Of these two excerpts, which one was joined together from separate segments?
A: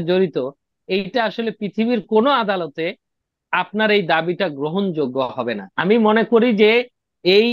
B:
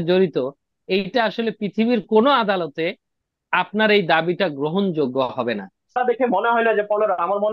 B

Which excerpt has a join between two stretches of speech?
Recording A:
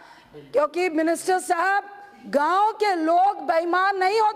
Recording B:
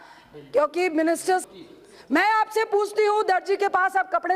B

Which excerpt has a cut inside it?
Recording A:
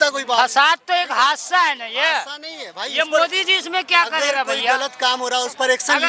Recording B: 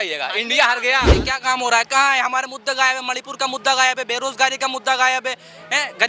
B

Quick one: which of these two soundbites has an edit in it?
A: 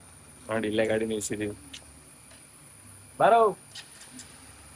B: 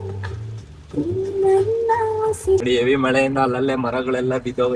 B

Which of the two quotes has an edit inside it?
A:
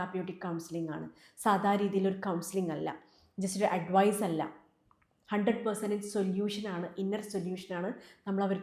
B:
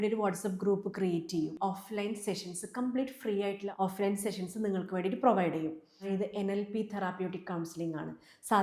B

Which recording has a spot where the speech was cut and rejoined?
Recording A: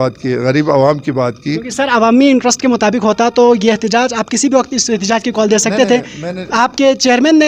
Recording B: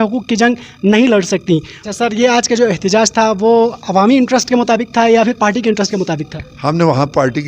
B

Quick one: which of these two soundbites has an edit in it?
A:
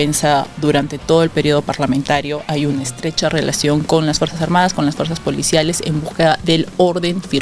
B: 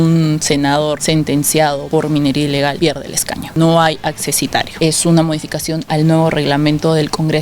B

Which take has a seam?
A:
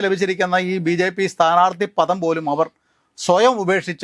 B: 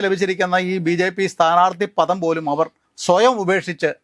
B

